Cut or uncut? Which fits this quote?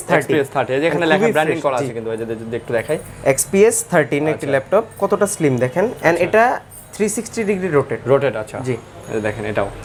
uncut